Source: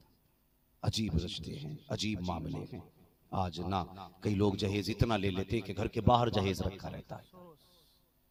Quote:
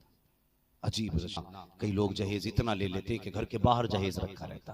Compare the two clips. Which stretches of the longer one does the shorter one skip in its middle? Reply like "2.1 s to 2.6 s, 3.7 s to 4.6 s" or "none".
1.4 s to 3.8 s